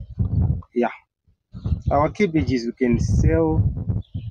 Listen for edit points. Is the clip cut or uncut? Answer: uncut